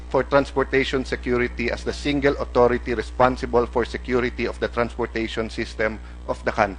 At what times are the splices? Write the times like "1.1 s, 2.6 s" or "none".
4.3 s